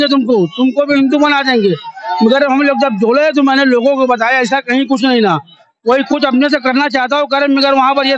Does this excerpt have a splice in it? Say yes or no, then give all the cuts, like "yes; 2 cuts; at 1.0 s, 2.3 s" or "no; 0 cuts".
no; 0 cuts